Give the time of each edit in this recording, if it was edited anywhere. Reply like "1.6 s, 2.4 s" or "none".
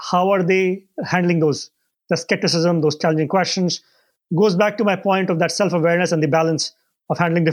3.0 s